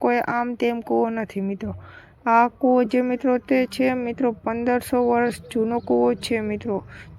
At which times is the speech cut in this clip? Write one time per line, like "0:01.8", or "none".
0:06.2